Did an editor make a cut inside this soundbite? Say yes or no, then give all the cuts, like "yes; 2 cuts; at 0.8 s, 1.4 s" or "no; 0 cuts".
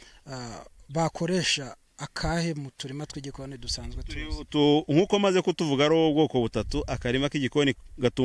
no; 0 cuts